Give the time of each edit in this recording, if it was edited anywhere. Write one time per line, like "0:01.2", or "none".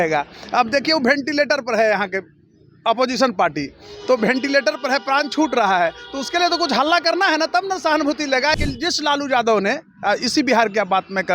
0:08.5